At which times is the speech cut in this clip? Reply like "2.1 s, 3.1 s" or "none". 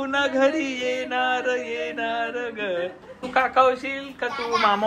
3.1 s